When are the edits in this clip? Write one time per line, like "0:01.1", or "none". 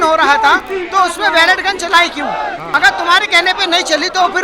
0:02.7